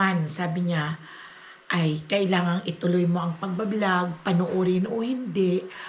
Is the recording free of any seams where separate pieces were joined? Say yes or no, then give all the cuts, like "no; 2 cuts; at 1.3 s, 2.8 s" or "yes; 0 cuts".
yes; 0 cuts